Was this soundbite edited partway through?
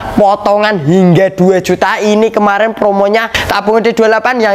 yes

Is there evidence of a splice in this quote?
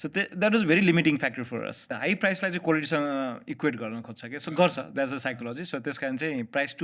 yes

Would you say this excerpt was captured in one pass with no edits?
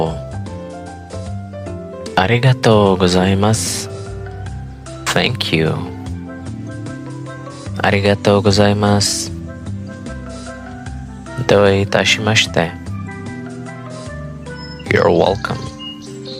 no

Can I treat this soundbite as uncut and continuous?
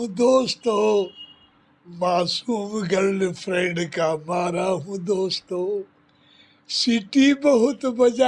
yes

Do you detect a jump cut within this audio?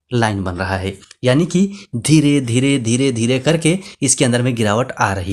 no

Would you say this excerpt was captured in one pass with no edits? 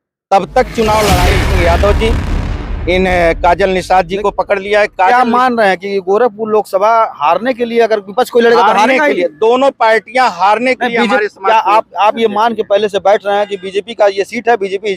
no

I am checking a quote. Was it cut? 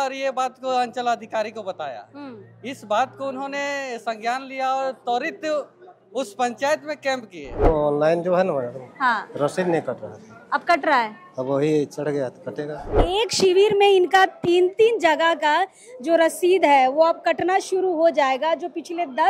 yes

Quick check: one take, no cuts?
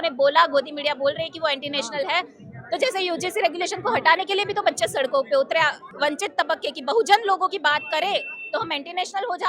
no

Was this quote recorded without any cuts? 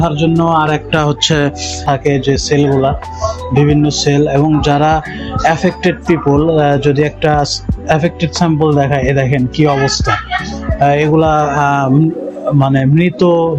no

